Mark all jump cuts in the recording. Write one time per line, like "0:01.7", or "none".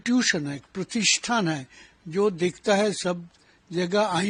none

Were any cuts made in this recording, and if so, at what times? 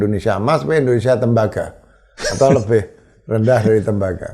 none

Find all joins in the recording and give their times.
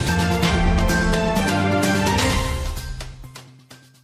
none

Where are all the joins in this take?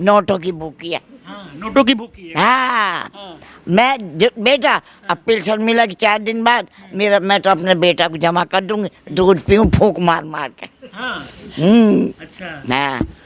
none

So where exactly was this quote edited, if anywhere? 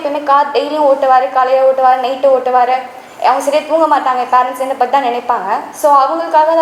none

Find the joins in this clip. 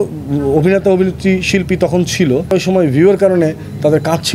0:02.5

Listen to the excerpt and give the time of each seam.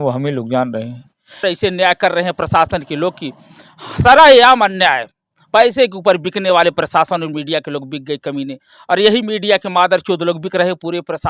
0:01.4

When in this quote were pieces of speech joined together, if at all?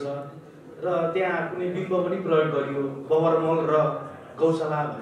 none

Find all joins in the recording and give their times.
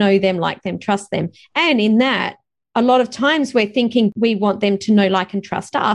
0:04.1

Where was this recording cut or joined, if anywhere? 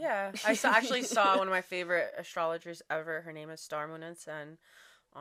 none

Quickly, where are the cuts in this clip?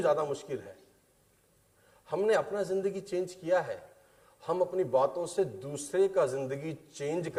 none

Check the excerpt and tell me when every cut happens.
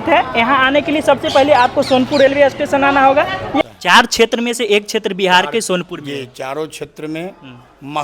0:03.6

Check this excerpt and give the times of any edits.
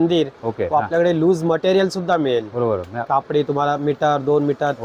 none

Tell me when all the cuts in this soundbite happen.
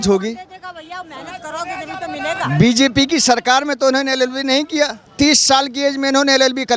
0:05.1

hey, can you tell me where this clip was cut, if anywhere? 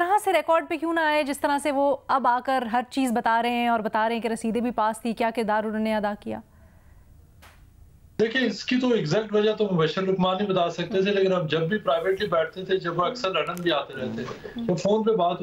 none

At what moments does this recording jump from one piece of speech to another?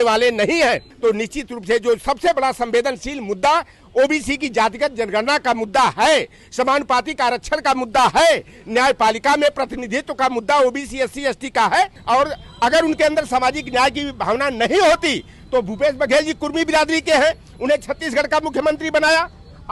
0:00.9
0:12.0

